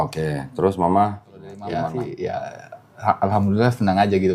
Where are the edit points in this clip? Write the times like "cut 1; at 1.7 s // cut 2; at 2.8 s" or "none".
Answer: cut 1; at 1.8 s